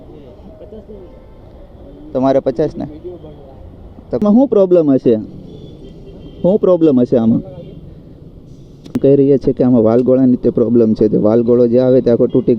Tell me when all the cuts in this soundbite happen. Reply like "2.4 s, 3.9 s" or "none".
4.2 s, 9.0 s